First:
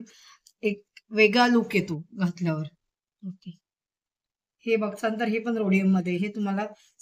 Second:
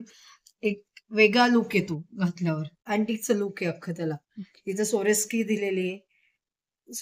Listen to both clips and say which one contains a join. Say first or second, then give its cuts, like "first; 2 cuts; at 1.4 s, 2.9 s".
second; 1 cut; at 2.7 s